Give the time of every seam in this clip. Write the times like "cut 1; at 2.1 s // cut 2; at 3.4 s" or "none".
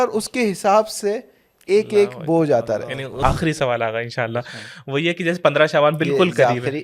cut 1; at 3.2 s

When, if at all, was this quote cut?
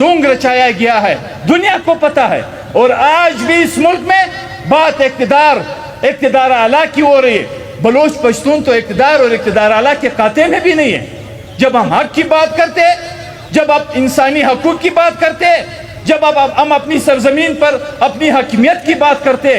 none

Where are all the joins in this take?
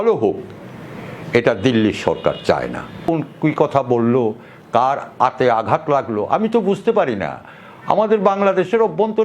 cut 1; at 3.1 s

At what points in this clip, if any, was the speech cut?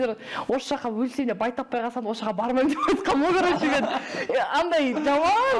none

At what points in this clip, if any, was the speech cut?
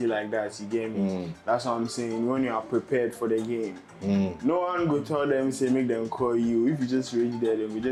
none

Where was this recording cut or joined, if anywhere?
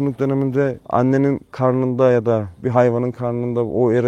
cut 1; at 0.8 s // cut 2; at 1.5 s // cut 3; at 2.6 s

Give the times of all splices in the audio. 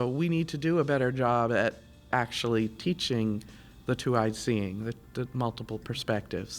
cut 1; at 2.1 s

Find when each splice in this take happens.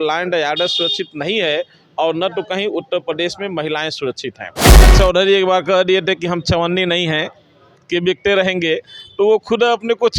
cut 1; at 4.9 s

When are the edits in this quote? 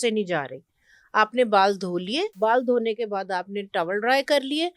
cut 1; at 2.3 s

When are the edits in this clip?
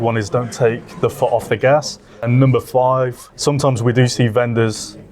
cut 1; at 2.3 s // cut 2; at 3.2 s

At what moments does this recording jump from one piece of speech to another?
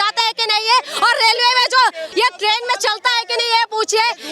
cut 1; at 2.0 s

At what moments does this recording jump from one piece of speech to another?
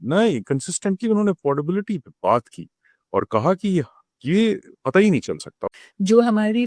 cut 1; at 5.6 s

